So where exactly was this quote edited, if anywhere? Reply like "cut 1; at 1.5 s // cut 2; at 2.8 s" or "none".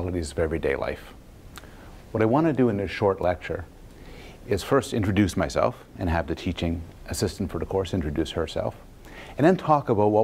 none